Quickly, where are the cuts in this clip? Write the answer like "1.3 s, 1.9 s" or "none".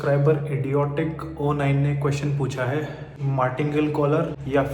none